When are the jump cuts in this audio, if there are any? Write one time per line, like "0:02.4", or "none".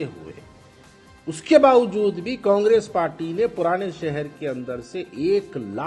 none